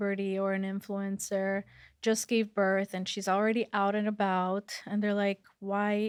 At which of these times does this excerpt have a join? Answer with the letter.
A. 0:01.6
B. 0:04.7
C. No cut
C